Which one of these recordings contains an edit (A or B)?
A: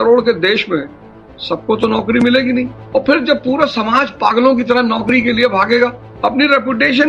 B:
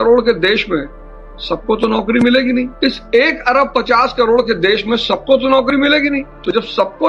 A